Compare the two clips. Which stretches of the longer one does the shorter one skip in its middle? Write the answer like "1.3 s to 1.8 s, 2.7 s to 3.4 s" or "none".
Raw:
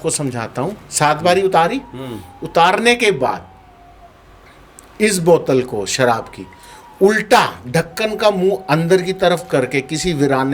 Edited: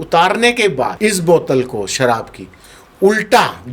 3.4 s to 4.9 s